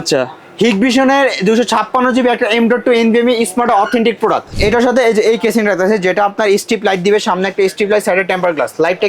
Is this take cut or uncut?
cut